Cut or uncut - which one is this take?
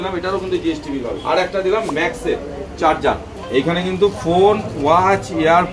cut